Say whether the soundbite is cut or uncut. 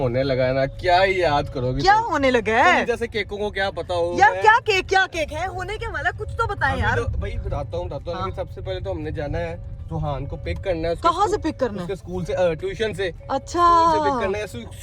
uncut